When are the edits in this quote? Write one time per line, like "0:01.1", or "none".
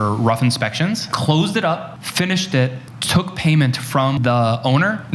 0:02.0
0:04.2